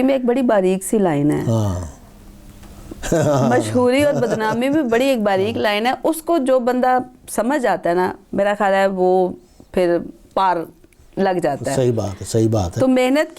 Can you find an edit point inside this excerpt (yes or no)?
no